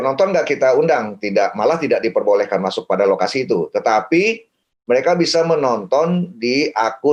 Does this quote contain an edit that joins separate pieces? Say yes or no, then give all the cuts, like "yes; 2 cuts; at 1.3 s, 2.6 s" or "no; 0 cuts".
no; 0 cuts